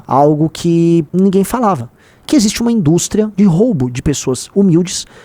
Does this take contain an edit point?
yes; 2 cuts; at 1.1 s, 3.3 s

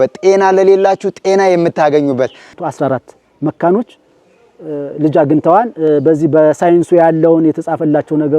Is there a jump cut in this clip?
yes; 1 cut; at 2.6 s

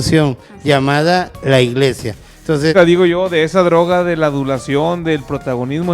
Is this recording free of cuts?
no; 1 cut; at 2.7 s

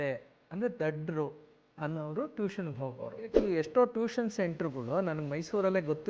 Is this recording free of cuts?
no; 1 cut; at 3.4 s

